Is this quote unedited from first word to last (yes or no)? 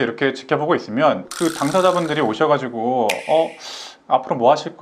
yes